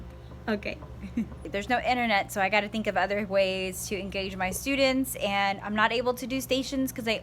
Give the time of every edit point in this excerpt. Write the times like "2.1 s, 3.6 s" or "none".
1.4 s